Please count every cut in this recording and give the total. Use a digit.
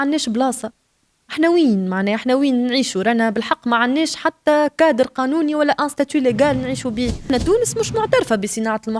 1